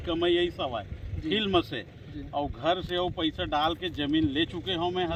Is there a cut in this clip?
no; 0 cuts

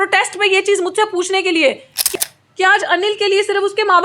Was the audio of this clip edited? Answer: yes; 1 cut; at 2.1 s

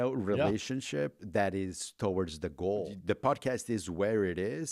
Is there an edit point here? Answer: yes; 1 cut; at 2.9 s

